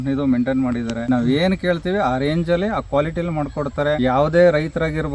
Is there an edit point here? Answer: yes; 2 cuts; at 1.0 s, 4.0 s

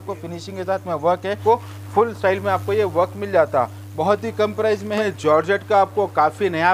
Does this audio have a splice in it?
yes; 2 cuts; at 1.4 s, 4.9 s

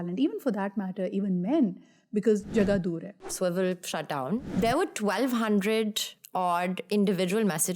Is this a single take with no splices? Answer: no; 2 cuts; at 3.3 s, 4.5 s

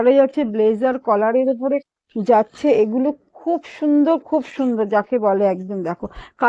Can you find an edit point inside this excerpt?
no; 0 cuts

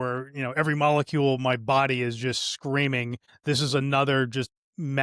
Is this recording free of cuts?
no; 1 cut; at 3.3 s

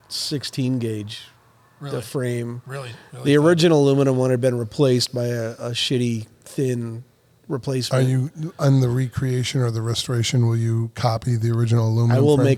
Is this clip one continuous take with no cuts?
yes; 0 cuts

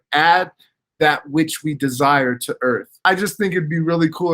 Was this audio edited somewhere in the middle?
yes; 1 cut; at 2.9 s

